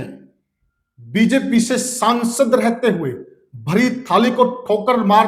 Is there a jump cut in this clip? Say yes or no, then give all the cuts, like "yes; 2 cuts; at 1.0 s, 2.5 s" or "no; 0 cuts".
no; 0 cuts